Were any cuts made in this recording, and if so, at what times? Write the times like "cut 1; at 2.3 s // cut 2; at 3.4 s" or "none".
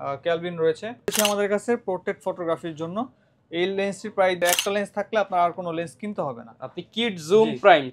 cut 1; at 1.1 s // cut 2; at 4.4 s